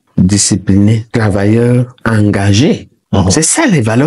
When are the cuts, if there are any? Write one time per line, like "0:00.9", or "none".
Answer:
0:02.9

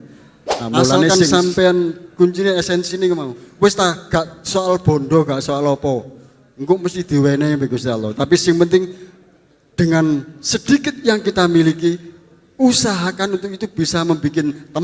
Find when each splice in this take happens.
0:01.1

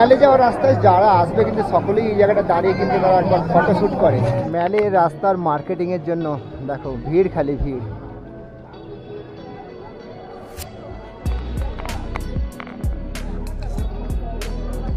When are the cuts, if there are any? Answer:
none

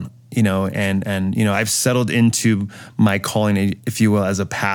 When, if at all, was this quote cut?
0:03.8

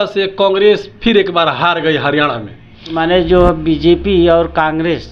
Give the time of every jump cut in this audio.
0:03.0

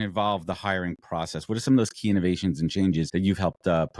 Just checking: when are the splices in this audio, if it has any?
0:03.1

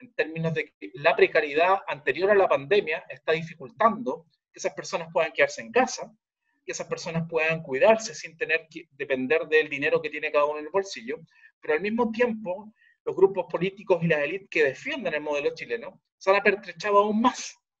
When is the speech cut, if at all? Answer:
none

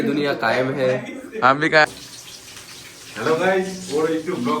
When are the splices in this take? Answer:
0:01.9

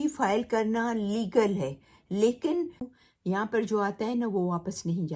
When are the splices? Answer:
0:02.9

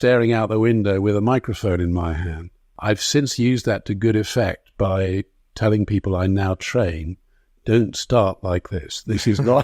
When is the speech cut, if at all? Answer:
0:02.7

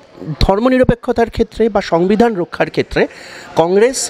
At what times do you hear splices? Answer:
none

